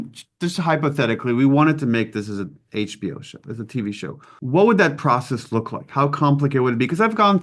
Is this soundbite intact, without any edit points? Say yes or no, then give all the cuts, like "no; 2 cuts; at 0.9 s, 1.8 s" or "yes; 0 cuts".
no; 1 cut; at 4.3 s